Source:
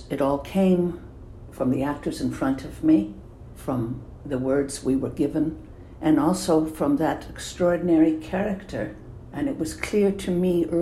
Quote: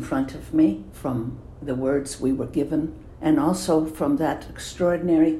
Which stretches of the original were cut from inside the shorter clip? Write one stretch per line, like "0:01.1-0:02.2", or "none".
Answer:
0:03.2-0:03.5
0:05.7-0:05.8